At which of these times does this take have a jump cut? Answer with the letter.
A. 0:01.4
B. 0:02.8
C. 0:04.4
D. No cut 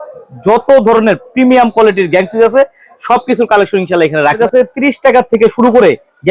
C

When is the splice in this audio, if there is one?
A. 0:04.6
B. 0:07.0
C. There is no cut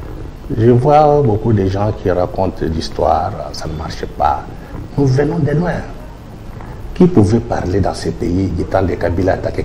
C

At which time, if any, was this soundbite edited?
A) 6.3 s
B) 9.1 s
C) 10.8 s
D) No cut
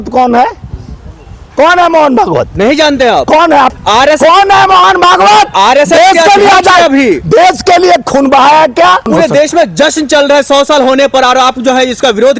B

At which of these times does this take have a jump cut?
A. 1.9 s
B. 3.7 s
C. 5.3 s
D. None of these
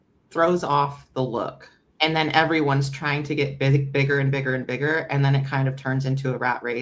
A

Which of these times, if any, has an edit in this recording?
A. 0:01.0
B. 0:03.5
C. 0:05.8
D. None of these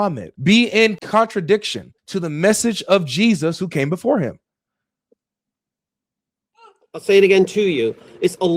A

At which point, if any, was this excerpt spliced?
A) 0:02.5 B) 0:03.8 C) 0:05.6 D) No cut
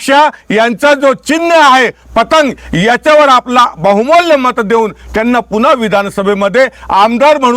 D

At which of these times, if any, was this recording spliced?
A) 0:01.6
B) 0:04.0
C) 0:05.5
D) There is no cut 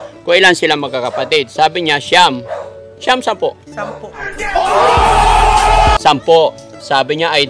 D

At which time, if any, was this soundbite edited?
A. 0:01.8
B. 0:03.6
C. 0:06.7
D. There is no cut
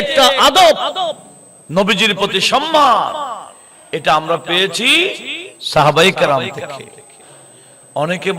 D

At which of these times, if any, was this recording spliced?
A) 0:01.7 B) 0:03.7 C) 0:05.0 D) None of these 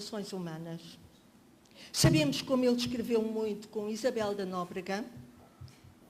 A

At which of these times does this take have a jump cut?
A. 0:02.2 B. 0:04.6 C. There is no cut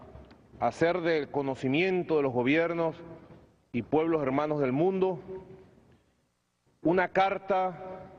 B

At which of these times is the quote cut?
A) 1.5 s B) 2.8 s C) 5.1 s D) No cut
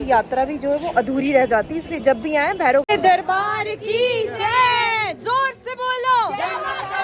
B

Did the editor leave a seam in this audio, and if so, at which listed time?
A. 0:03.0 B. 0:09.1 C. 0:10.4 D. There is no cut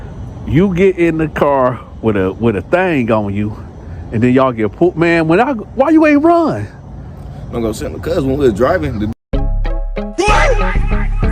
B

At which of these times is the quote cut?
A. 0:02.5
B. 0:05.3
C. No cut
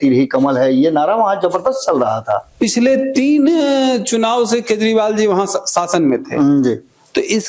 A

